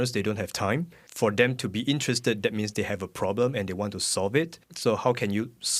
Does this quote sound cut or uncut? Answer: cut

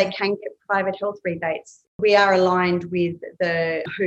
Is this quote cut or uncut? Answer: cut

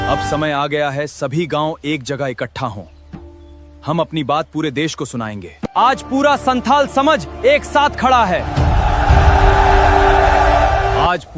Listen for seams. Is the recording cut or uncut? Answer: cut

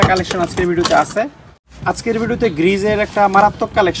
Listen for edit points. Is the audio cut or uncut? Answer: cut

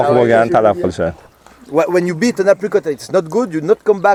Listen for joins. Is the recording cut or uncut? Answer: uncut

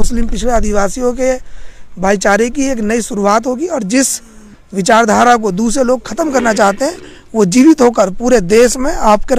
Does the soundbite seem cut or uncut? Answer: uncut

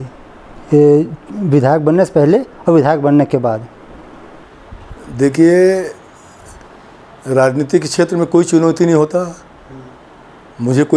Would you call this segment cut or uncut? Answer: uncut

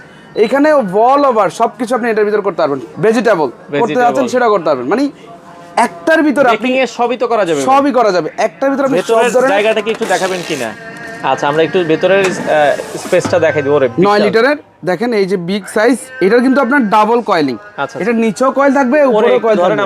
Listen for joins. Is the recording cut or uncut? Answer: uncut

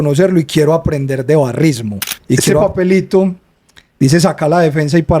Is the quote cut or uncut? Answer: cut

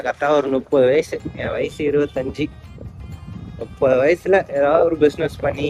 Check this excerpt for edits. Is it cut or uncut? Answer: uncut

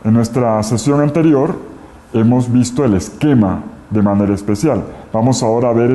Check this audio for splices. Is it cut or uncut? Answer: uncut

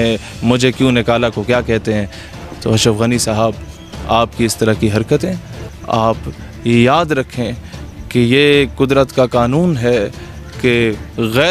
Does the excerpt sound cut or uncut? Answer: uncut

